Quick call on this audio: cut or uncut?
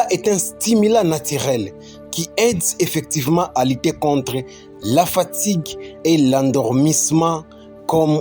uncut